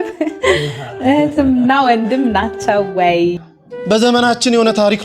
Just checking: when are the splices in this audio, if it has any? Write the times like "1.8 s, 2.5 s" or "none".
3.7 s